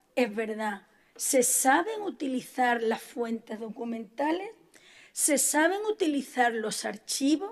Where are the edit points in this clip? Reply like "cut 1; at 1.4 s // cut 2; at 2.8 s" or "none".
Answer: cut 1; at 6.2 s